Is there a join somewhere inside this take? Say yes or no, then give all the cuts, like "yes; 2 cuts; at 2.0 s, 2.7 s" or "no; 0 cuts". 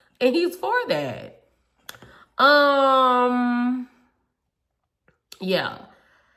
no; 0 cuts